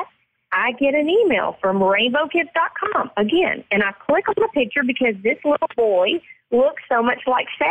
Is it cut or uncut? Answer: uncut